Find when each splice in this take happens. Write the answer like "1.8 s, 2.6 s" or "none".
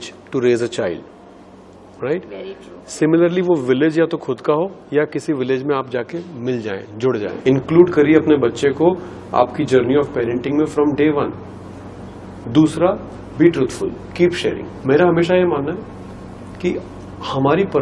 7.3 s, 14.7 s